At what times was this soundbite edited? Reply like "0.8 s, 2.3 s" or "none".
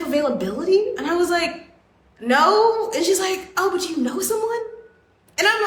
none